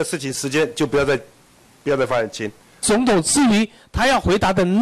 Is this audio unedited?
no; 1 cut; at 2.8 s

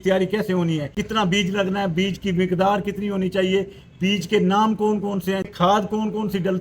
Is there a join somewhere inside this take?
yes; 2 cuts; at 0.9 s, 5.5 s

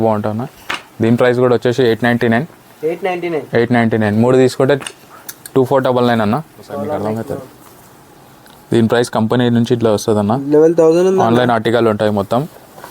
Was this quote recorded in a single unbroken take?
no; 1 cut; at 7.1 s

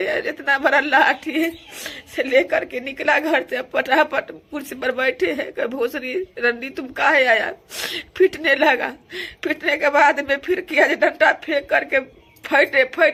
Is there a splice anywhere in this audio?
no; 0 cuts

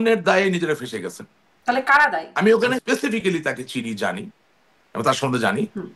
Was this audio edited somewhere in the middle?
yes; 1 cut; at 2.8 s

